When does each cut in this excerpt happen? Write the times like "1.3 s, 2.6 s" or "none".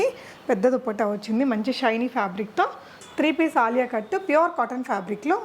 2.9 s

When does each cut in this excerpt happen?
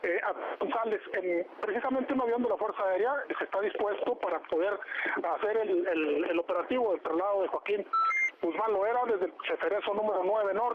4.9 s

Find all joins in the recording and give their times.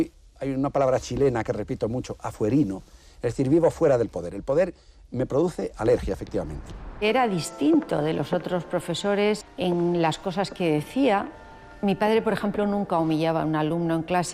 7.0 s, 9.4 s

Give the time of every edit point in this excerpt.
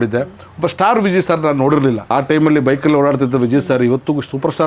2.0 s

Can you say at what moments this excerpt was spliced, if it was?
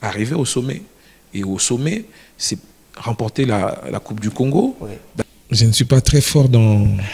5.1 s

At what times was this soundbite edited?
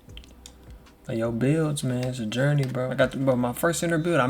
2.5 s

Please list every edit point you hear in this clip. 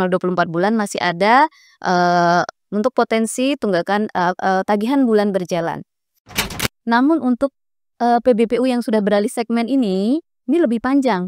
6.4 s

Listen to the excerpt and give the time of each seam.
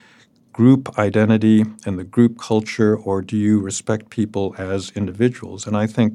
none

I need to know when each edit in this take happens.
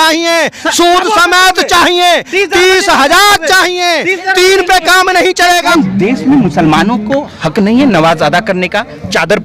5.7 s

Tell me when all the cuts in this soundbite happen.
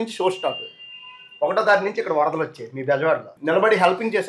3.3 s

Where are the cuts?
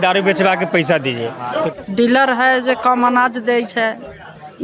1.7 s

